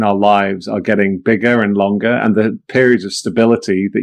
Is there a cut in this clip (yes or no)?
no